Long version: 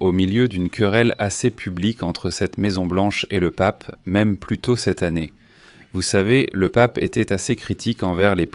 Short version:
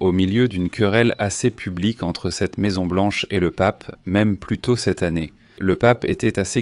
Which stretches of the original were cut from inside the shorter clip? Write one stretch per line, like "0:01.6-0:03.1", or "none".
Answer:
0:05.6-0:06.5